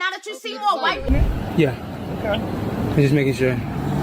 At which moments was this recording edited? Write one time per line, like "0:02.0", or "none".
0:01.1

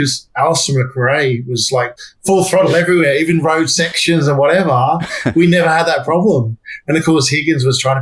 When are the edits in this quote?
0:02.0

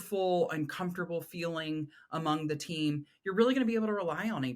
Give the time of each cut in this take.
none

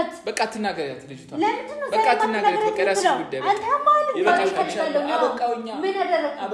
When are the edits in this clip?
0:04.5

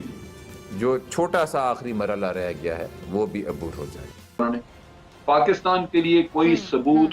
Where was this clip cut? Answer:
0:04.4

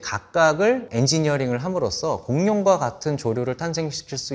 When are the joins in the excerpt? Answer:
none

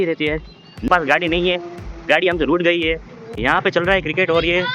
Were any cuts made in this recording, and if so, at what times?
0:00.9
0:03.3

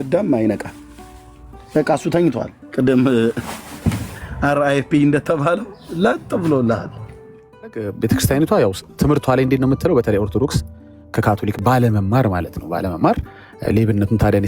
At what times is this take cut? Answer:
0:07.9

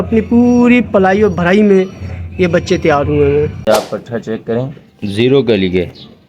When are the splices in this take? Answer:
0:03.6

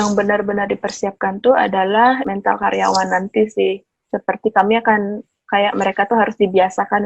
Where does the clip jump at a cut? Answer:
0:02.2

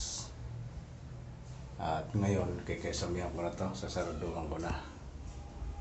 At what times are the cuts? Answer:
none

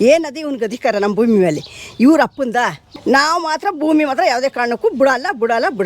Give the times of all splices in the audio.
0:02.8

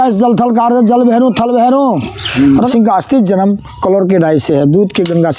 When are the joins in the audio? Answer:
0:02.7

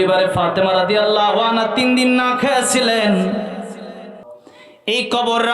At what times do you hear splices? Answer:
0:04.2

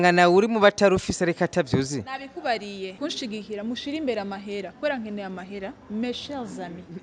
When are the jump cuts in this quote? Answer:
0:03.0

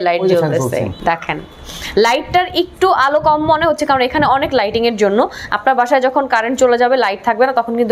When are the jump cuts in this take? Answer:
0:00.9

